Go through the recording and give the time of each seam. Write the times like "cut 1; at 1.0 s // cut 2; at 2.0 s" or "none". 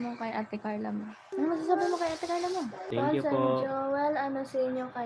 cut 1; at 1.3 s // cut 2; at 2.9 s